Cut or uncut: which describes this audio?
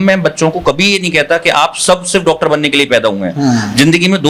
uncut